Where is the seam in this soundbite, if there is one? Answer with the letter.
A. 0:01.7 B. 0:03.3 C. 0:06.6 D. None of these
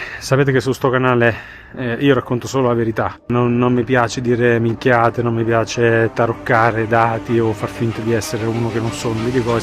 B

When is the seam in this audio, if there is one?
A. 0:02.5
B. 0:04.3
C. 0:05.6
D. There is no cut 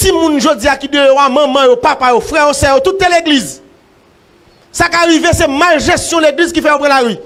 D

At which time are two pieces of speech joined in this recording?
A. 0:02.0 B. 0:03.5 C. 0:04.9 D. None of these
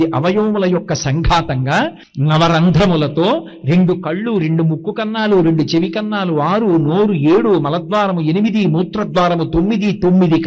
A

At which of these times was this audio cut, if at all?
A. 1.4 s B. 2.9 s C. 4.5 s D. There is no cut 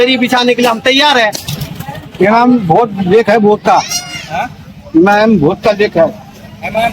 A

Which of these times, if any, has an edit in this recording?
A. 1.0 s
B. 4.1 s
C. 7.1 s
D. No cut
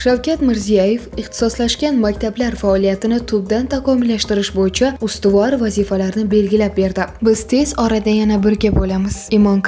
C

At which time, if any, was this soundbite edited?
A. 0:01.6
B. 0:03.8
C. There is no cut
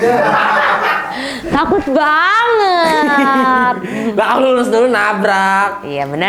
C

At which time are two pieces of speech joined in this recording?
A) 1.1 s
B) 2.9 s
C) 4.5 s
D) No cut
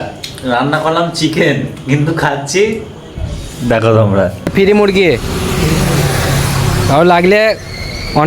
C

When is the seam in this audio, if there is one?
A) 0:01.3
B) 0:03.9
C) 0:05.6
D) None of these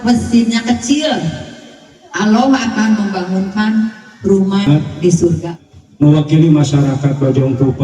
C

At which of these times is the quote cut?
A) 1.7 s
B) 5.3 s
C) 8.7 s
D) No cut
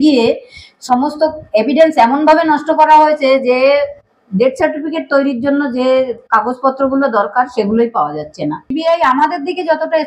C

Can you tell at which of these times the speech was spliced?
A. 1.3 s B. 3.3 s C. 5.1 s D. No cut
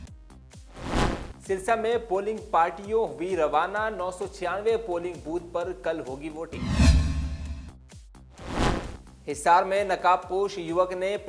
A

